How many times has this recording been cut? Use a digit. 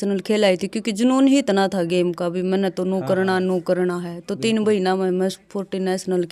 0